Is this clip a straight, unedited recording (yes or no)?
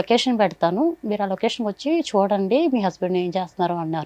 yes